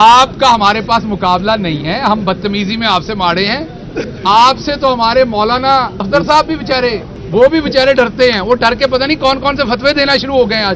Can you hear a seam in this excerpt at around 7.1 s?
yes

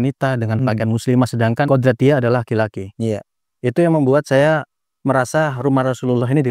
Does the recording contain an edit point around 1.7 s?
yes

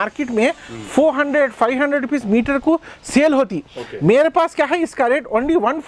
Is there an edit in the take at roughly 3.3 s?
no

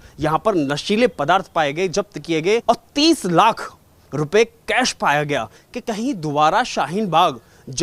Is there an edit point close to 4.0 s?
no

